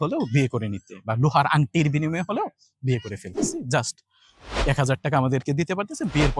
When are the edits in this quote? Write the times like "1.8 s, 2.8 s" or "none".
3.4 s